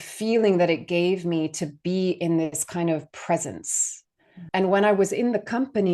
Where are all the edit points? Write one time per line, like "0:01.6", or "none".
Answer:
0:04.3